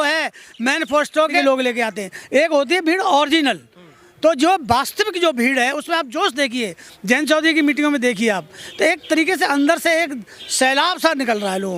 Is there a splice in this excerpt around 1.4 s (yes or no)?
yes